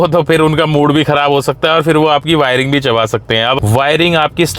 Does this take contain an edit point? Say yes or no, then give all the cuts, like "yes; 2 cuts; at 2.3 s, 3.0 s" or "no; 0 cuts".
yes; 1 cut; at 3.6 s